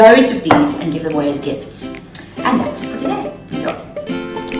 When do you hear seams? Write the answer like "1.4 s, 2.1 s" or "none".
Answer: 3.2 s